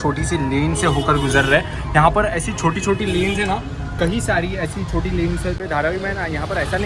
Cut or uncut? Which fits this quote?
uncut